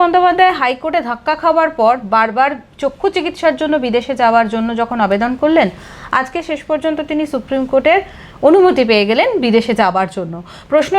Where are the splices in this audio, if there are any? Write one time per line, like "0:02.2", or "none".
none